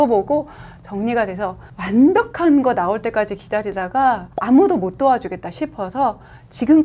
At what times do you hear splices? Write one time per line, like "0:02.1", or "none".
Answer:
0:01.7
0:04.3